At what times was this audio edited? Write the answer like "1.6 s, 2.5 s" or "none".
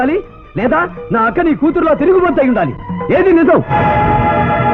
none